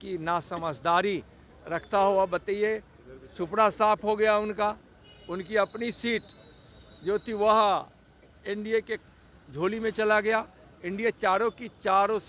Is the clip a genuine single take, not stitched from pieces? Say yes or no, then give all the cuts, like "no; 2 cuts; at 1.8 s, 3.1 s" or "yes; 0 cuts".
yes; 0 cuts